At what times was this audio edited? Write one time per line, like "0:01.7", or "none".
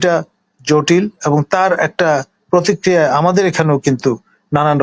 none